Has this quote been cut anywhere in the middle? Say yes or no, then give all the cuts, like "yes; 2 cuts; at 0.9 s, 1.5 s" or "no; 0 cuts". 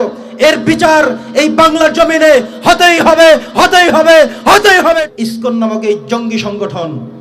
yes; 1 cut; at 5.0 s